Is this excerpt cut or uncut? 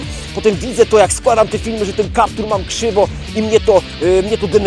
uncut